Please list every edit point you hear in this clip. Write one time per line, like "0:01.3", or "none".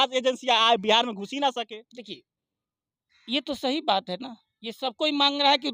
none

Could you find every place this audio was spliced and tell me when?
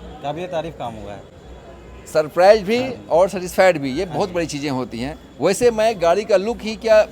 none

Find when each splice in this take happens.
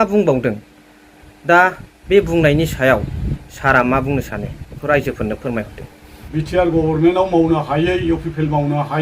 0:06.2

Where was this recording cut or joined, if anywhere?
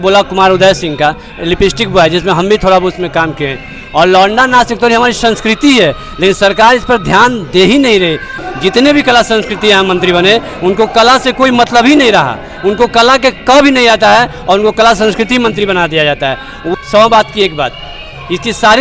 0:08.3
0:16.7

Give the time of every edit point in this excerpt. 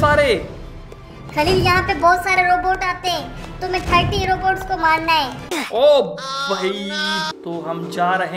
0:07.3

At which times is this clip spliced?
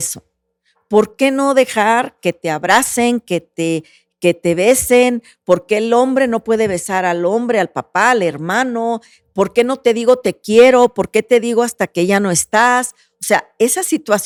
none

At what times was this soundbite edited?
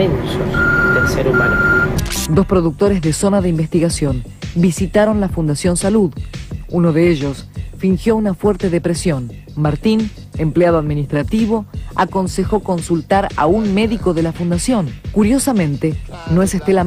0:15.2

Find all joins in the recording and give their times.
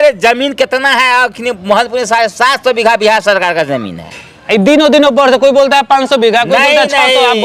none

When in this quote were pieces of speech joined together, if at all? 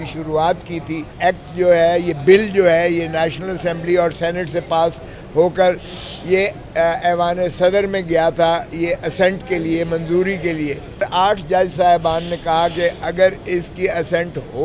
0:01.1
0:11.0

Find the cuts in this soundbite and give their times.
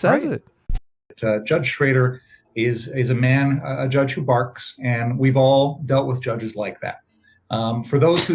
0:01.0

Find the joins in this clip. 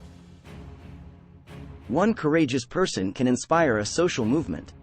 0:01.2

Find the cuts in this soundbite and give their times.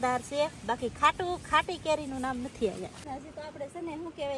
0:03.1

